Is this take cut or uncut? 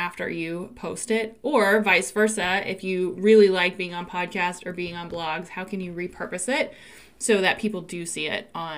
uncut